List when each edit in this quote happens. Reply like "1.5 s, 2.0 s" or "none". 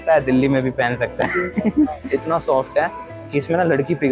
2.0 s